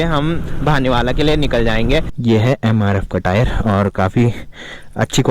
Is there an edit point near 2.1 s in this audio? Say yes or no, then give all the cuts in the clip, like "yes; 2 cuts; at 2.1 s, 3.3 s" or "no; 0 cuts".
yes; 1 cut; at 2.1 s